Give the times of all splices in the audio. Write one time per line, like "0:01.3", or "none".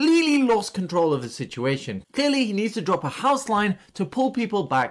0:02.0